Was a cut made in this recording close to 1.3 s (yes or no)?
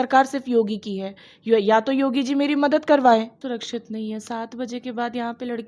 no